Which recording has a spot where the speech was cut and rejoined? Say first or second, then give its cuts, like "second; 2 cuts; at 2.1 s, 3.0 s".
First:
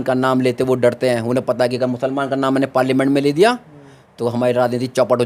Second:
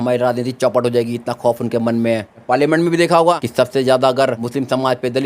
second; 3 cuts; at 2.4 s, 3.4 s, 4.4 s